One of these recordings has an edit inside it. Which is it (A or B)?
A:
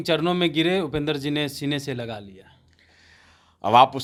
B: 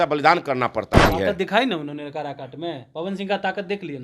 B